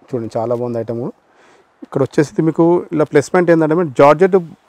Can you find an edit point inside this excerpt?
no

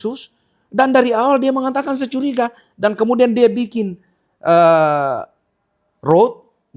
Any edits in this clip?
no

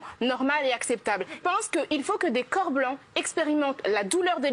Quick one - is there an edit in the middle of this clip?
yes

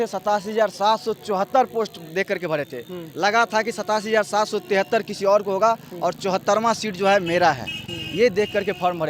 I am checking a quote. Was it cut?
no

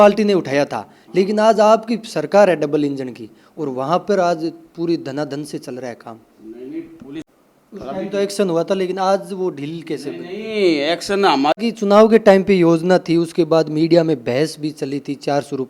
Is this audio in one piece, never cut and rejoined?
no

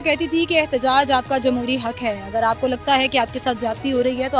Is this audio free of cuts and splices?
yes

